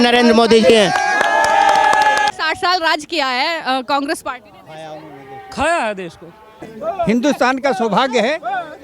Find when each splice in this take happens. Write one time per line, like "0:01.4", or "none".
0:02.4
0:06.7

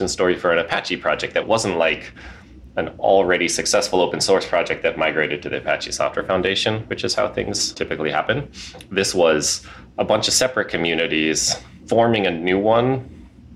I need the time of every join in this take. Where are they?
0:01.4
0:07.8
0:11.8

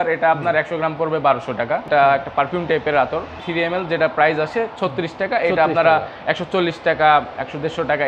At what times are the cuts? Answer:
0:01.8
0:03.4

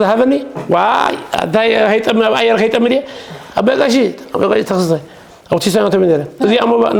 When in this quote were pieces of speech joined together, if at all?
none

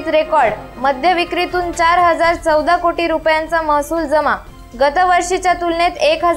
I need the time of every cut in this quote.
none

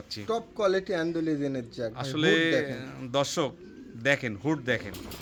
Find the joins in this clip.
none

